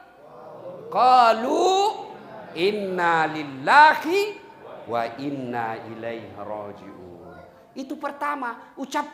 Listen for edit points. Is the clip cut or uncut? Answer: uncut